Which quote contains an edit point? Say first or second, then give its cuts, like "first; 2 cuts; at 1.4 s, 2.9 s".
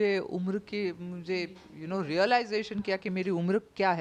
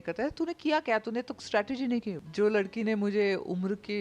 second; 1 cut; at 2.2 s